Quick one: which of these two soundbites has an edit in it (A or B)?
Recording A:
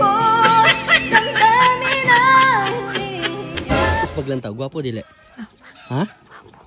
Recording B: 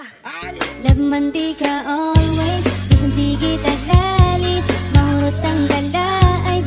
A